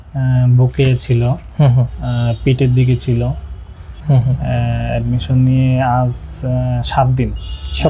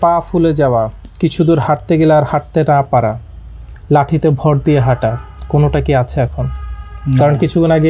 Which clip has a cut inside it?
first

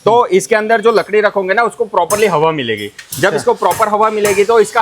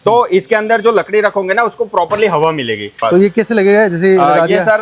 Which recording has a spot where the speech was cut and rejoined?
second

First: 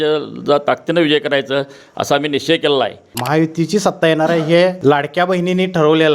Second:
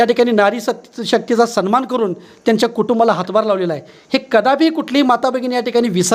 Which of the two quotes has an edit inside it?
first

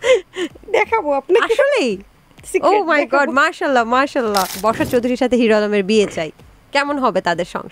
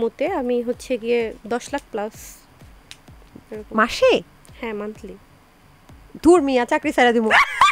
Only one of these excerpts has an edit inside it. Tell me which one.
first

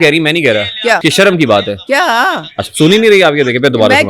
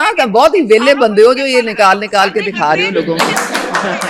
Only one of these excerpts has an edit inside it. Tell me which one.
first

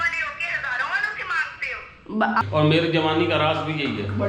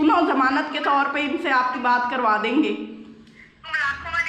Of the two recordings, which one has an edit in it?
first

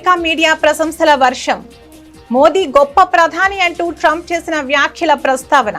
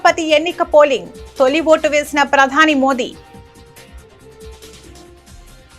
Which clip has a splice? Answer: second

